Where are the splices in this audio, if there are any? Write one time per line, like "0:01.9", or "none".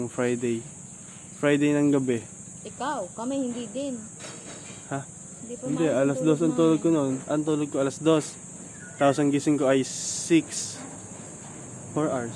none